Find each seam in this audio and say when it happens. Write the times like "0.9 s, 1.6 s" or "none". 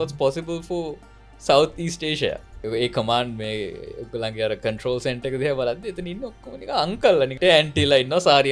2.5 s, 7.4 s